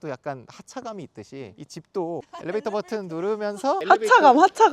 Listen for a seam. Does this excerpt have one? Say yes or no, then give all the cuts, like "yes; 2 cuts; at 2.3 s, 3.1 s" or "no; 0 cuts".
yes; 2 cuts; at 2.3 s, 3.8 s